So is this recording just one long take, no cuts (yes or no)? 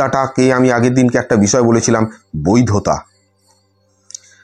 yes